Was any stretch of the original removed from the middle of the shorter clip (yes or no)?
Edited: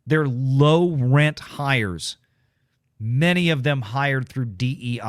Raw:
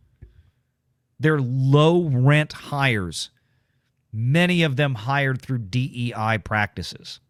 no